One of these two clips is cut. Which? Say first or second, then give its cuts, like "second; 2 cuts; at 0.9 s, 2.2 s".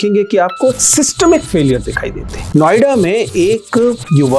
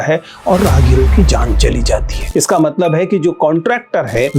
second; 1 cut; at 2.3 s